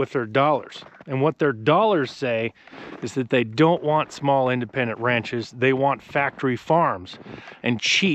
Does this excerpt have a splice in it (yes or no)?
no